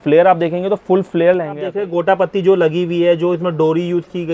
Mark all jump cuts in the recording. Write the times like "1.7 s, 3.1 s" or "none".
1.8 s